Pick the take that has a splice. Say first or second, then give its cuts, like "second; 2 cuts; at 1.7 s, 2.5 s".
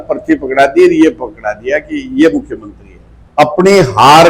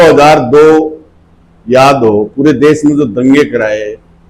first; 1 cut; at 3.2 s